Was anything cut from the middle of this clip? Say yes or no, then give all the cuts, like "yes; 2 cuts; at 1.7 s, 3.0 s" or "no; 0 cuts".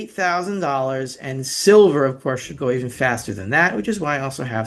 no; 0 cuts